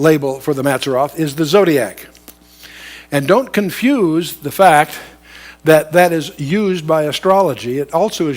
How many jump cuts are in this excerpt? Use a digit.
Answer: 1